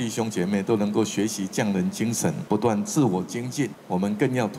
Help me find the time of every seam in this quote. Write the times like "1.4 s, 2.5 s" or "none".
2.4 s, 3.8 s

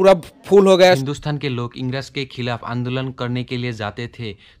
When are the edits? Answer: 1.0 s

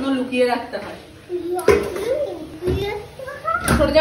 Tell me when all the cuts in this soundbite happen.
none

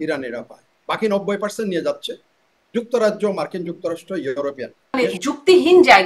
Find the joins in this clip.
4.8 s

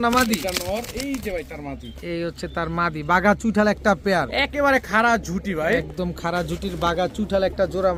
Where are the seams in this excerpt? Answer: none

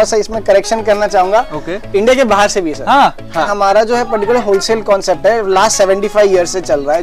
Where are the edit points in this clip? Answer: 3.5 s

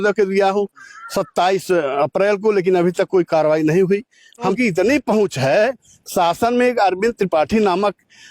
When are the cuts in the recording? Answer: 4.5 s

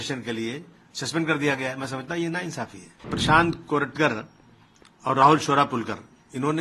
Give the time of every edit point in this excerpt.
3.1 s

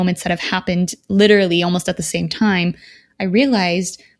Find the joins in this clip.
none

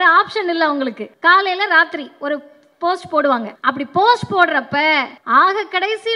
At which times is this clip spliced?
1.1 s, 3.5 s, 5.1 s

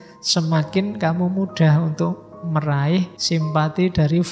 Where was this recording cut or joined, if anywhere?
3.2 s

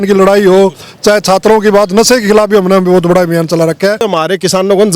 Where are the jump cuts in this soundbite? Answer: 4.1 s

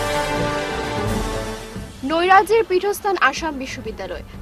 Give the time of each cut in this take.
1.1 s

